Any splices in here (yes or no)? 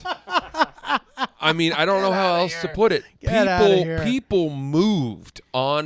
no